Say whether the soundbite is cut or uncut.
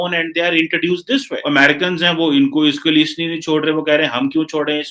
cut